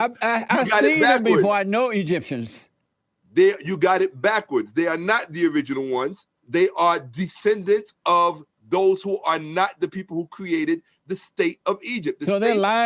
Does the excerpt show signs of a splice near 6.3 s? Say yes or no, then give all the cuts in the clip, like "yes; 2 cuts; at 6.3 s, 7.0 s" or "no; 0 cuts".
no; 0 cuts